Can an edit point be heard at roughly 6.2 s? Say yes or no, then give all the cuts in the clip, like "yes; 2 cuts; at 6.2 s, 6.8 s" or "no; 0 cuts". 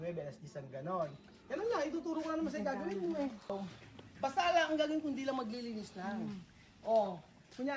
no; 1 cut; at 3.6 s